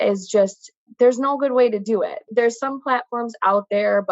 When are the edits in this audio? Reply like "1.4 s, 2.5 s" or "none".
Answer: 2.3 s